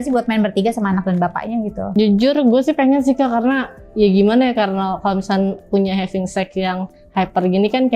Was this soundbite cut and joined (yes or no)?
yes